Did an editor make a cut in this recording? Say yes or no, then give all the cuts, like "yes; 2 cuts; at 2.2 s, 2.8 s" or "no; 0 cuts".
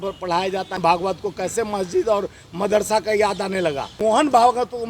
yes; 2 cuts; at 0.8 s, 4.0 s